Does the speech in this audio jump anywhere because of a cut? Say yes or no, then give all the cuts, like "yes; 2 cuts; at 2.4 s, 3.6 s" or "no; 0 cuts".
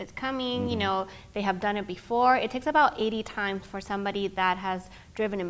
no; 0 cuts